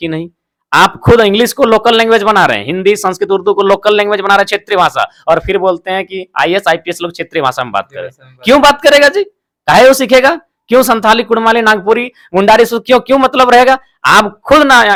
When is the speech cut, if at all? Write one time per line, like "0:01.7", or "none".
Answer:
none